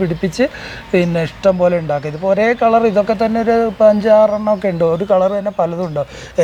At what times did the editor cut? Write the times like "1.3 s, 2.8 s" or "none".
none